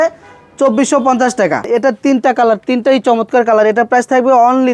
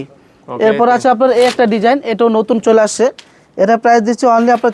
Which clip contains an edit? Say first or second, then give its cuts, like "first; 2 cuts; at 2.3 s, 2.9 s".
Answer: first; 1 cut; at 1.7 s